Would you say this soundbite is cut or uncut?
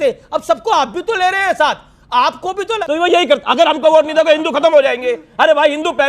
cut